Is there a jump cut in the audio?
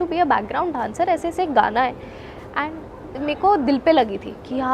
yes; 1 cut; at 3.2 s

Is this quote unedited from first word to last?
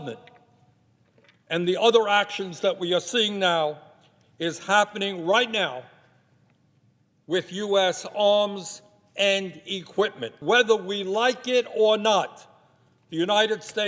no; 1 cut; at 10.3 s

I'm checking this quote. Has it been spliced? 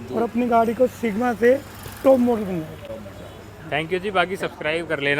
no; 0 cuts

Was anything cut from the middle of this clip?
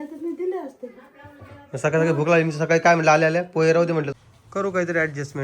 yes; 1 cut; at 4.1 s

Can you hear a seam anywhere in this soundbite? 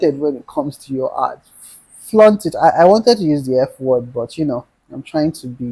no; 0 cuts

